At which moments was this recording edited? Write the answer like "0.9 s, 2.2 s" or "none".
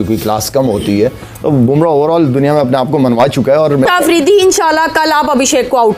3.9 s